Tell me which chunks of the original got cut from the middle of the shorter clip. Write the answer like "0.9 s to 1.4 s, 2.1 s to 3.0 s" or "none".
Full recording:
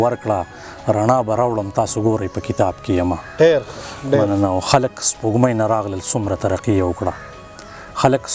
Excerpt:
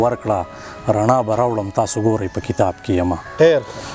none